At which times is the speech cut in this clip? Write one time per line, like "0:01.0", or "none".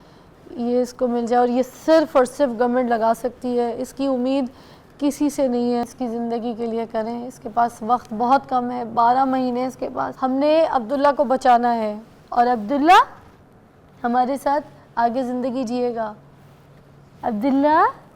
0:05.9
0:10.1